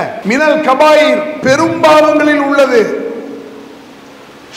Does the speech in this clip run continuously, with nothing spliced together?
yes; 0 cuts

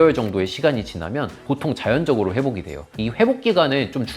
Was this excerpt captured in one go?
no; 1 cut; at 2.9 s

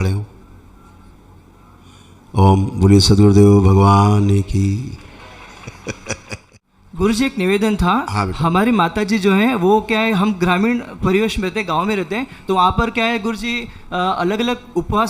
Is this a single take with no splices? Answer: no; 1 cut; at 6.4 s

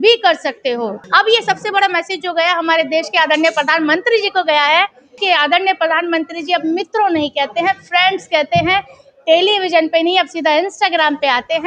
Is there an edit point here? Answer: yes; 2 cuts; at 1.0 s, 5.2 s

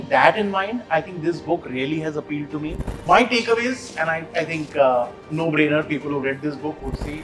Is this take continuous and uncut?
no; 1 cut; at 2.9 s

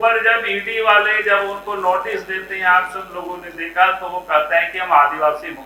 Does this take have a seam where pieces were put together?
no; 0 cuts

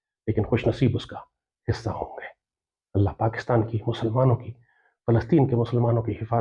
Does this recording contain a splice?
no; 0 cuts

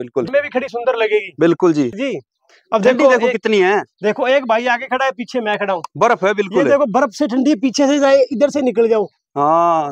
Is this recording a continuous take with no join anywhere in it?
no; 1 cut; at 1.9 s

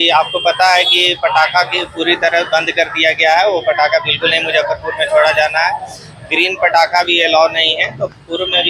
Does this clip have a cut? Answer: no; 0 cuts

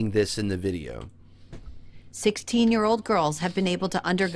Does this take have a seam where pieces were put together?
no; 0 cuts

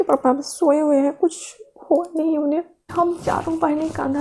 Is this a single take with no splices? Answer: no; 1 cut; at 2.9 s

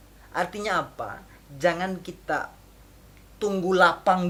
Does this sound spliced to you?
no; 0 cuts

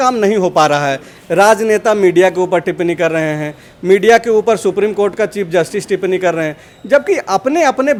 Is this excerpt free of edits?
yes; 0 cuts

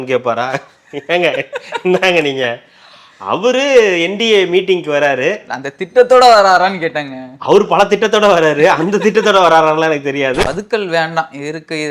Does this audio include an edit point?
yes; 1 cut; at 10.4 s

